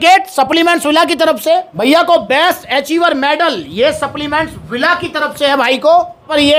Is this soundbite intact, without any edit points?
yes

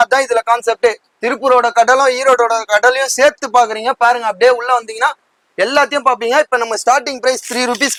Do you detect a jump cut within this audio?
no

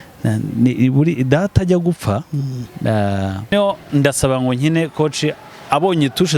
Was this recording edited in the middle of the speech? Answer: yes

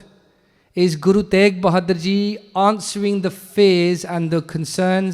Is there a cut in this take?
no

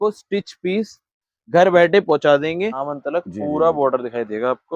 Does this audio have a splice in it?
yes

